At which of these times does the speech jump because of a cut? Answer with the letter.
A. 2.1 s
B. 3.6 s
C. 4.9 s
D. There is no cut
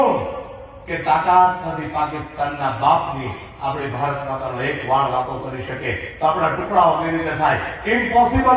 D